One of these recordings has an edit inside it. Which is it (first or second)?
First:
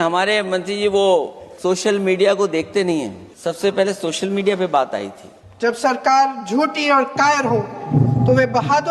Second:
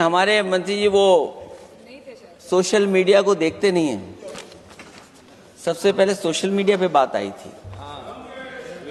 first